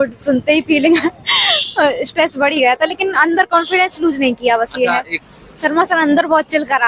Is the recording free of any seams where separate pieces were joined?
no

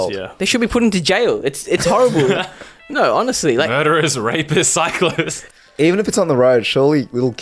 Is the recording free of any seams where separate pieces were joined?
no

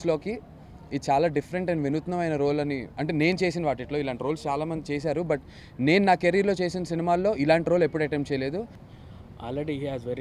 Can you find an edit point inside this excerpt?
yes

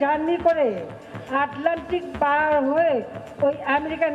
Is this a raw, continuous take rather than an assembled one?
yes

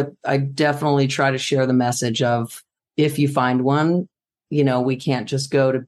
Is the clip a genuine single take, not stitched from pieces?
yes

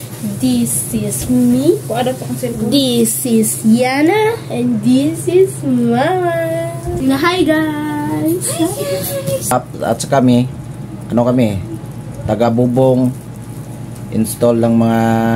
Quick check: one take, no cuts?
no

